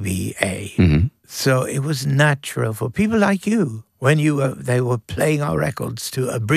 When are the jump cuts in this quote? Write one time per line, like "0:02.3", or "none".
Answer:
0:01.2
0:03.8